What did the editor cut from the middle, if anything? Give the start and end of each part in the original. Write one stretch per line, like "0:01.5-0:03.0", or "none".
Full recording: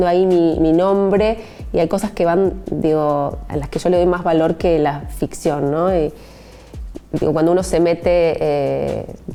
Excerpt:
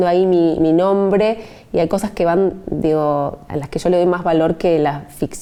none